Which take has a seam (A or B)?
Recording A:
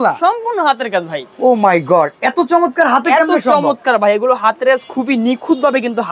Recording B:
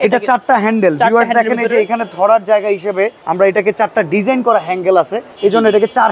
B